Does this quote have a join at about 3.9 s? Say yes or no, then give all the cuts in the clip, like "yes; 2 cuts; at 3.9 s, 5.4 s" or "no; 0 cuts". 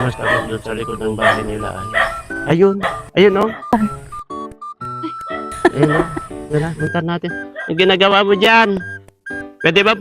no; 1 cut; at 2.3 s